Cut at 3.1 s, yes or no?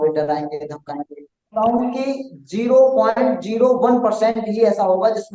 no